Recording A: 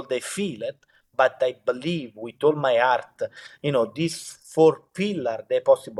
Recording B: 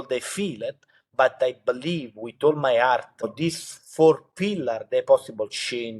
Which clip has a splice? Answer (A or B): B